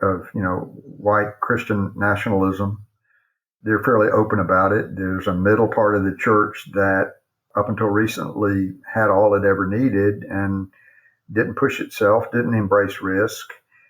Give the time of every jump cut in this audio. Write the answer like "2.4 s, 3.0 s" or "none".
3.5 s